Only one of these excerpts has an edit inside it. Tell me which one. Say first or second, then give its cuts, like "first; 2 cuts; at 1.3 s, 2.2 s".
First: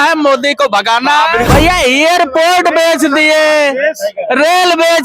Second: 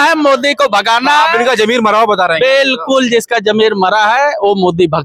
first; 1 cut; at 1.4 s